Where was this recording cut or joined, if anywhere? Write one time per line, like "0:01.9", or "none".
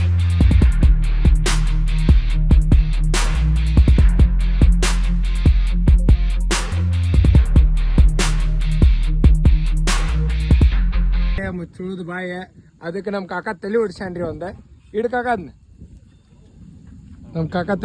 0:11.4